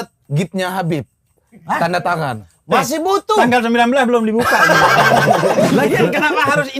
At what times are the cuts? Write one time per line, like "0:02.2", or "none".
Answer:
0:05.7